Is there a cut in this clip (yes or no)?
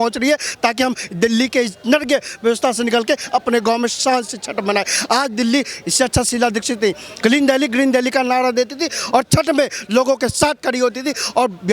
no